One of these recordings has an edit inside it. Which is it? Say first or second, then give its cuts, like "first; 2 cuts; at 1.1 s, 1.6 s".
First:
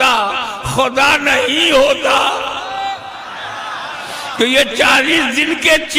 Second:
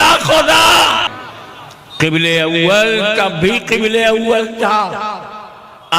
second; 1 cut; at 1.1 s